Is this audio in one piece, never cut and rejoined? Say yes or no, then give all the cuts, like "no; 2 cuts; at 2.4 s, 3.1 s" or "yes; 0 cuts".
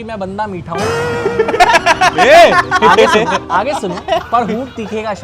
yes; 0 cuts